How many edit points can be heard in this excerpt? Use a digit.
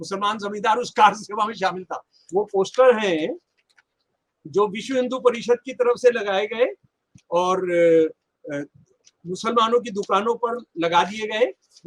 1